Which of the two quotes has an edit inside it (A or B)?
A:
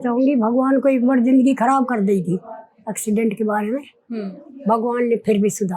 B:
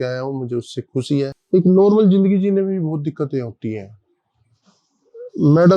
B